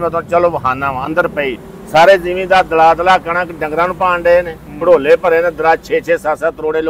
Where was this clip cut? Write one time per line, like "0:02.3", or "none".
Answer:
none

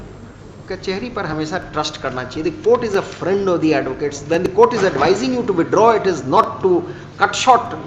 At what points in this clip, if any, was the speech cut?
none

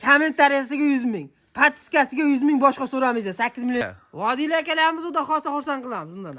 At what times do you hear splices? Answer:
0:03.8

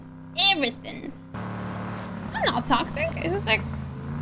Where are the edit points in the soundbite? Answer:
0:01.4

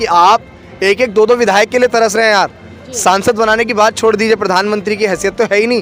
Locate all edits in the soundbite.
none

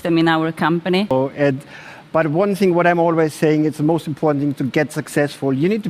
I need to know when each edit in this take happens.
0:01.1

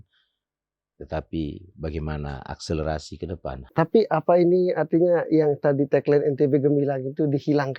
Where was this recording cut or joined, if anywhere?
0:03.6

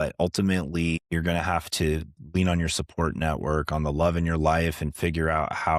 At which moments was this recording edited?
0:01.0

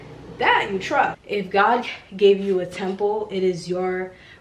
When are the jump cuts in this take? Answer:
0:01.2

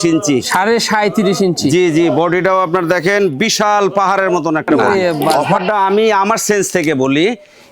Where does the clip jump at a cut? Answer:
0:05.3

